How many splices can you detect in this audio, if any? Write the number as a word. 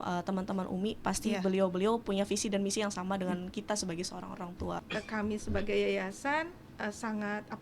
one